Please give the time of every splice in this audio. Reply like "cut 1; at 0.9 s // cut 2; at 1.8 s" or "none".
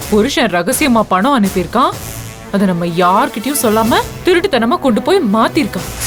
none